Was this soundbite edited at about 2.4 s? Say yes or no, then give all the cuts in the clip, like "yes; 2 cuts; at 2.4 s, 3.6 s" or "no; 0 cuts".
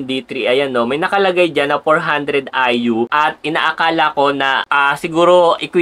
no; 0 cuts